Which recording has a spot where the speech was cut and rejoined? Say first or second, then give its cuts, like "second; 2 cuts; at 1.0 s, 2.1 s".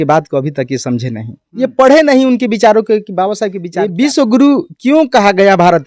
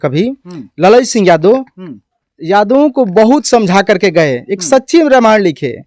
first; 1 cut; at 3.6 s